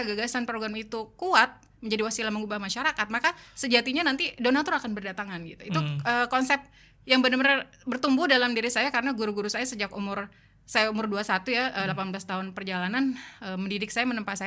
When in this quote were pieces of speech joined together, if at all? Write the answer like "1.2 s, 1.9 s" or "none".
none